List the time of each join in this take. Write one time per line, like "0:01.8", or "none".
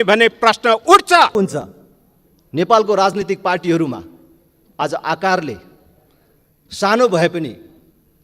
0:01.3